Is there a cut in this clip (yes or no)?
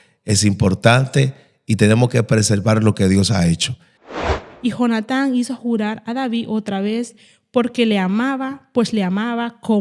yes